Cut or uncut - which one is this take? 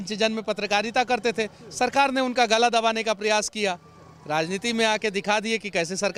uncut